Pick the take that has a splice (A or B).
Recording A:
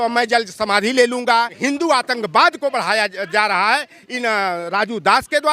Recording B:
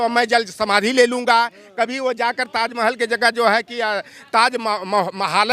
A